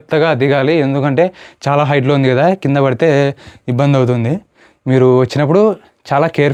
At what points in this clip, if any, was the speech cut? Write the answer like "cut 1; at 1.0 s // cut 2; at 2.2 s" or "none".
none